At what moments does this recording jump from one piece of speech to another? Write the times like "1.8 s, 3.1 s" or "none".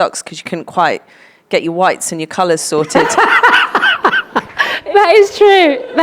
4.8 s